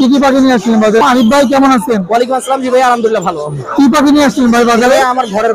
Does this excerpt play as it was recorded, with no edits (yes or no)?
no